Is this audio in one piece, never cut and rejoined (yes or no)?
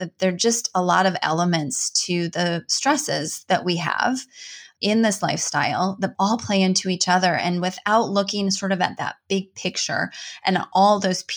no